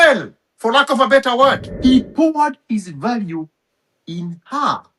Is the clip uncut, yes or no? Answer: no